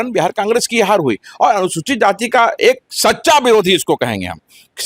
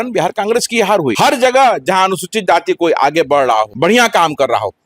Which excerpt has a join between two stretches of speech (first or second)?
second